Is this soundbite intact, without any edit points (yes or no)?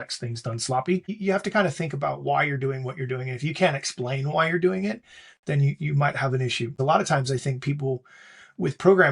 no